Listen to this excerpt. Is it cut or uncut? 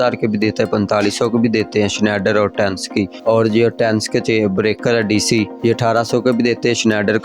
cut